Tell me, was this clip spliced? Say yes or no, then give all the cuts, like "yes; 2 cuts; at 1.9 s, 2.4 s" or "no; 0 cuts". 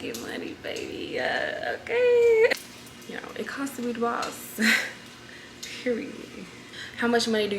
yes; 2 cuts; at 2.5 s, 6.5 s